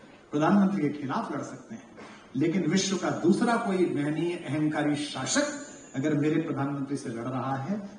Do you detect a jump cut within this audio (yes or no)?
no